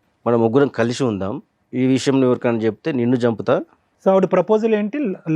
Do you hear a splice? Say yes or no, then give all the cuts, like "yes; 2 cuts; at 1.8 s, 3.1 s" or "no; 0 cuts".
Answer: yes; 1 cut; at 1.5 s